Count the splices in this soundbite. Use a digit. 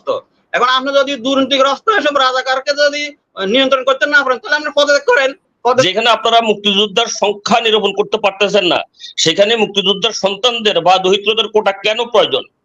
1